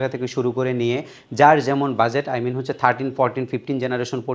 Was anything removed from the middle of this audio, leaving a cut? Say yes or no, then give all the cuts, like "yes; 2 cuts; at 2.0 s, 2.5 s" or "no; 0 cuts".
no; 0 cuts